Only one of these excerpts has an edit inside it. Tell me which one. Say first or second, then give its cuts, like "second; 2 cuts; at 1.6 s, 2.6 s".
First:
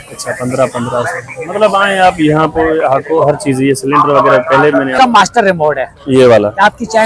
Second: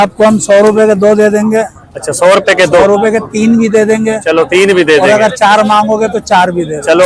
first; 1 cut; at 5.0 s